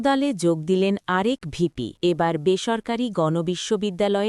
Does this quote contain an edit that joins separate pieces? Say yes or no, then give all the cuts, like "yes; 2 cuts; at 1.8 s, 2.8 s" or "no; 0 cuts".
yes; 1 cut; at 1.9 s